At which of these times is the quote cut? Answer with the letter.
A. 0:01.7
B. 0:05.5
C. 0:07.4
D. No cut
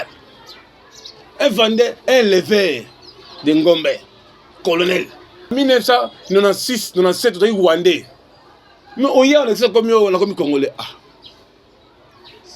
B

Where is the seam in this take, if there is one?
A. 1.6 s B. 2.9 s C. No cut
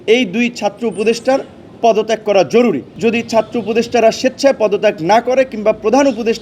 B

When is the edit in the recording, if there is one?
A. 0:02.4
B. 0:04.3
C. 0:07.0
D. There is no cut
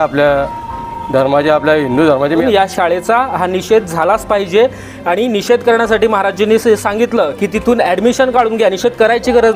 A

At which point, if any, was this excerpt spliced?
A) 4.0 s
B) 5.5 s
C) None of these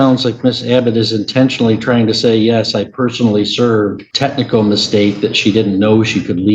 A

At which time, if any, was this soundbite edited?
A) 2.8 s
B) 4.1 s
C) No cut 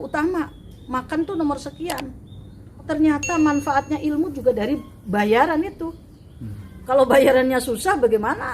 A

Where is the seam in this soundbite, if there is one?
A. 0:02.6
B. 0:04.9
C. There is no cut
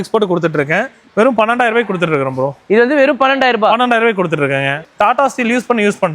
B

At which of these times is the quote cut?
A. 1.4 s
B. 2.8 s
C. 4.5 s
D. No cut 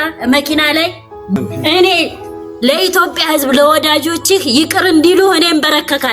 A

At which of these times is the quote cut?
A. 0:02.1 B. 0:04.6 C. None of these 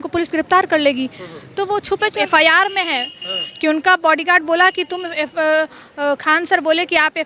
A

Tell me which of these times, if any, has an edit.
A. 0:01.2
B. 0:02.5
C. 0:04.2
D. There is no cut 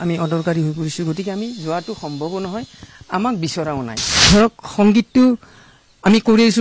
C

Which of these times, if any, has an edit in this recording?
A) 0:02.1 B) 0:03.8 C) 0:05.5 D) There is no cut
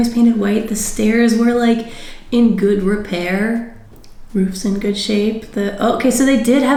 D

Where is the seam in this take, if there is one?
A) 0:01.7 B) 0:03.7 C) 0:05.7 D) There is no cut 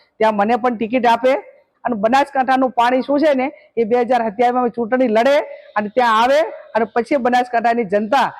A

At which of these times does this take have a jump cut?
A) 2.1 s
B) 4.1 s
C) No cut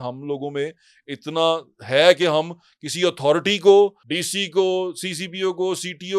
B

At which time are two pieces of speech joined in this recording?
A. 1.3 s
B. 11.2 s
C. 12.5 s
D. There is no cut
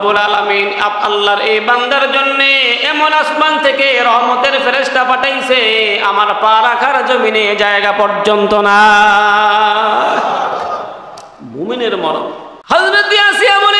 C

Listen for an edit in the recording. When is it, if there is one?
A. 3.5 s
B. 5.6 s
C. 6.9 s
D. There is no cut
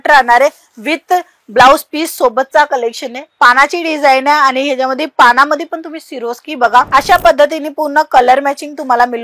C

